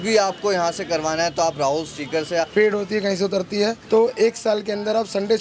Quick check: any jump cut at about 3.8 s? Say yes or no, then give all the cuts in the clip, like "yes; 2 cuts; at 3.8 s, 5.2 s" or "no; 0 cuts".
no; 1 cut; at 2.5 s